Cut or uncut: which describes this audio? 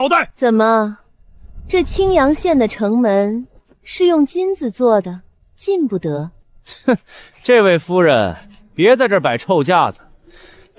uncut